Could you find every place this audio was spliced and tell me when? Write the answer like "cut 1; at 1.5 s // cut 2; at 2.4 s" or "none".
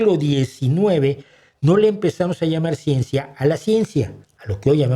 none